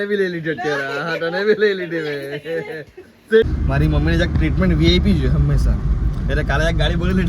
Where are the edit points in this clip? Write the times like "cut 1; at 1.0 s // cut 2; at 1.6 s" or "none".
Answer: cut 1; at 3.5 s

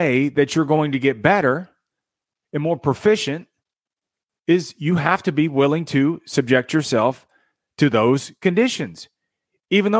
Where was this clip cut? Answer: none

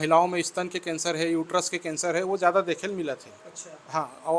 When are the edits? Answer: none

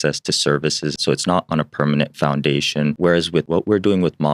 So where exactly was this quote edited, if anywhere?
cut 1; at 0.9 s // cut 2; at 3.4 s

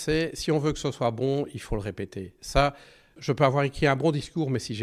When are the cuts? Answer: none

